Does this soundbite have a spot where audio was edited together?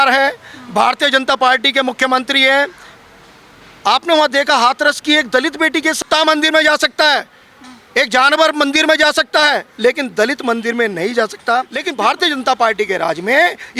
yes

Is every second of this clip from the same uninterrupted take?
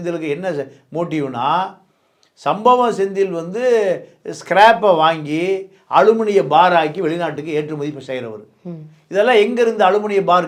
yes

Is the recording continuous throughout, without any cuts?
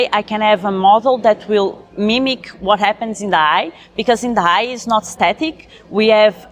yes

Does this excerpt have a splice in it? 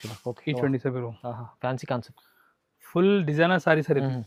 no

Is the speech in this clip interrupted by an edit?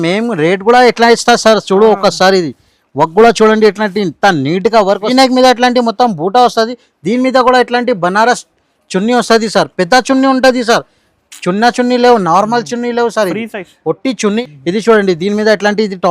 yes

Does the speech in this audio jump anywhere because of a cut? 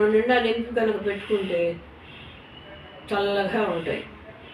no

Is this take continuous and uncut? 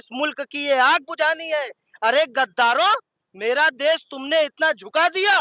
yes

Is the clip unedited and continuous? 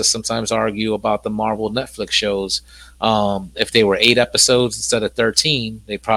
yes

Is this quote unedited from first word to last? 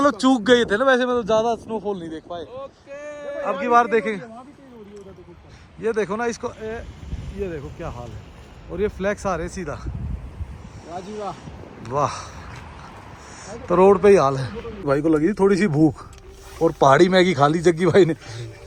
yes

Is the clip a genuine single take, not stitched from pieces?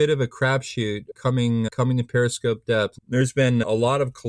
yes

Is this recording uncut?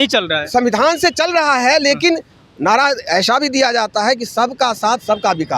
yes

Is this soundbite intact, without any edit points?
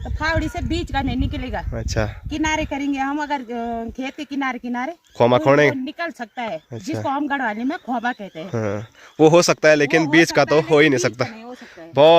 yes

